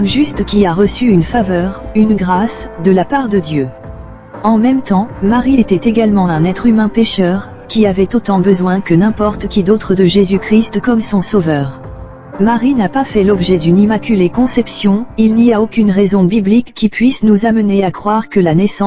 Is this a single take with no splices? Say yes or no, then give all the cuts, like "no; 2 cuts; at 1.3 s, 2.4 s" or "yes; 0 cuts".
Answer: no; 1 cut; at 1.3 s